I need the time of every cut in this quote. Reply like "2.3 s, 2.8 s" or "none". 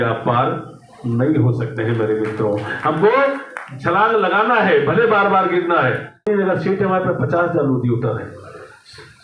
6.3 s